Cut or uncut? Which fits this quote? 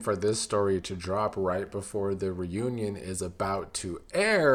uncut